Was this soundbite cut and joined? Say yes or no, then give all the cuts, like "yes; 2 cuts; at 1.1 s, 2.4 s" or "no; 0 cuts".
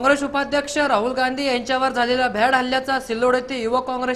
no; 0 cuts